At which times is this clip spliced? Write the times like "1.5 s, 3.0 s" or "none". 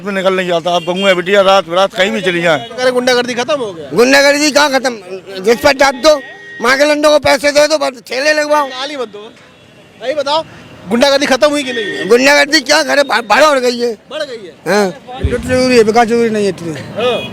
2.7 s, 15.2 s